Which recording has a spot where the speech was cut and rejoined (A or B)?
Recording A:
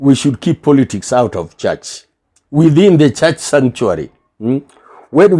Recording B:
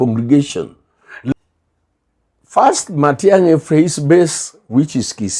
B